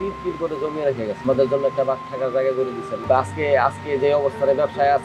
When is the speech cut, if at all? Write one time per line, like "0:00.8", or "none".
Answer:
0:01.2
0:02.9